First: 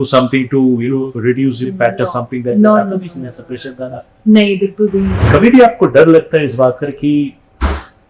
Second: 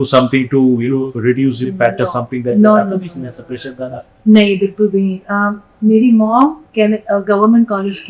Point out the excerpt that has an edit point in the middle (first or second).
first